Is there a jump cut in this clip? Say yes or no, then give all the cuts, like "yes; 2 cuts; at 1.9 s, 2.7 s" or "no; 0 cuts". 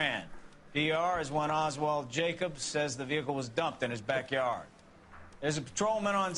no; 0 cuts